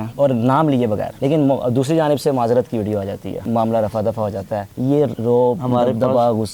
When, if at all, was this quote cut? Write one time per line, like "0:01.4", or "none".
0:03.3
0:05.0